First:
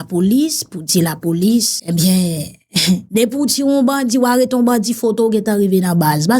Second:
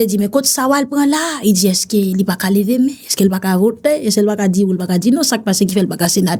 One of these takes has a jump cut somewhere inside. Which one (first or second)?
first